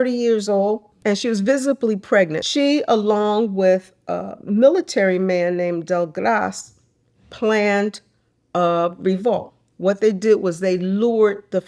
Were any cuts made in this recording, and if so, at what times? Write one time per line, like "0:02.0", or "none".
0:00.9
0:02.4